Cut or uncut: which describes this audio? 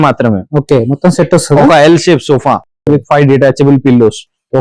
uncut